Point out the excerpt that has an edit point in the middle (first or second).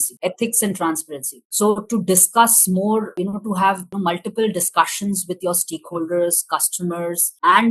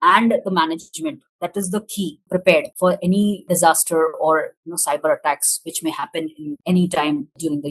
second